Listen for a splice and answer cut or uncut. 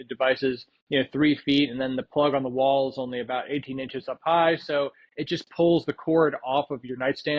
uncut